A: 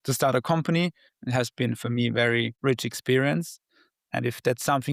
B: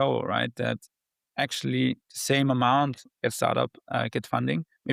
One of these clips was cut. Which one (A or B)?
A